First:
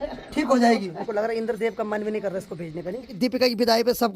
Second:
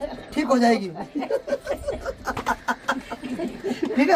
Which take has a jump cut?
first; 2 cuts; at 1.0 s, 3.1 s

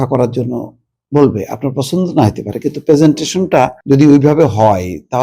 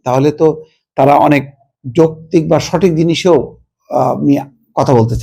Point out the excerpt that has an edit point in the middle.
first; 1 cut; at 3.8 s

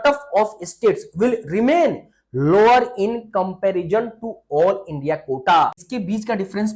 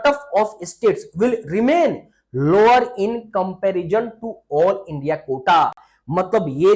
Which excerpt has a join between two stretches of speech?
first; 1 cut; at 5.9 s

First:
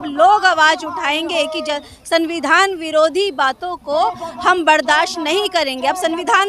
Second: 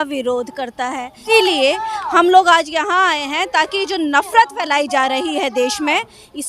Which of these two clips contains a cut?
second; 1 cut; at 1.2 s

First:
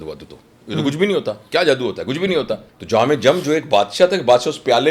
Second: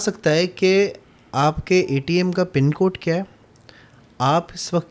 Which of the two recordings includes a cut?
first; 1 cut; at 2.7 s

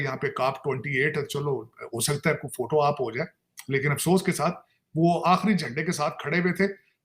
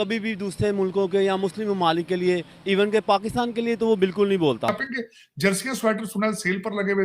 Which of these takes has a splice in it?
second; 1 cut; at 4.8 s

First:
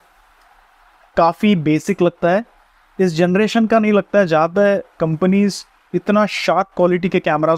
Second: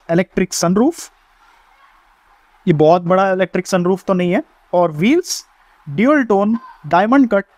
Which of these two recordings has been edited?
second; 2 cuts; at 2.2 s, 4.6 s

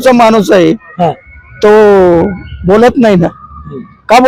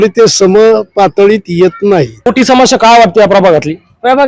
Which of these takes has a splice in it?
second; 1 cut; at 2.3 s

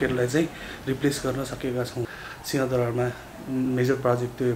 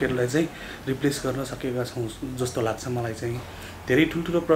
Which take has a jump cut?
first; 1 cut; at 2.2 s

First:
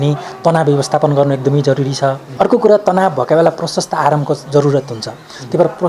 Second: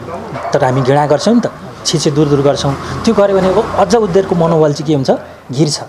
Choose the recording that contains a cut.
first; 1 cut; at 2.2 s

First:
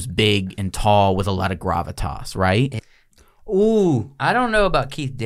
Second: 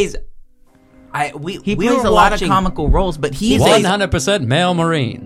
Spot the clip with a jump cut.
first; 1 cut; at 2.8 s

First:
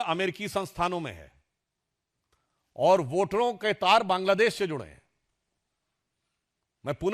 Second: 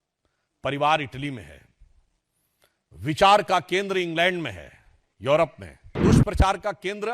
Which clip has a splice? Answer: second; 1 cut; at 6.0 s

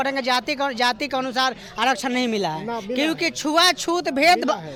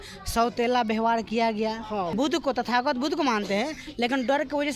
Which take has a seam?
second; 1 cut; at 2.1 s

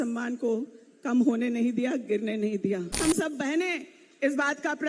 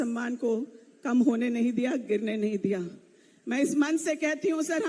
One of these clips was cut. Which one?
first; 1 cut; at 3.0 s

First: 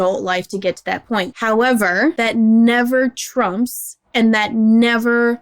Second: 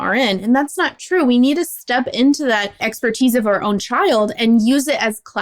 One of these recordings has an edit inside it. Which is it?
first; 2 cuts; at 1.3 s, 2.1 s

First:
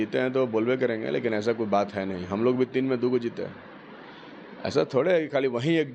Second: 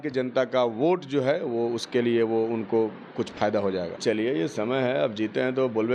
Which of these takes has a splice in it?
second; 1 cut; at 4.0 s

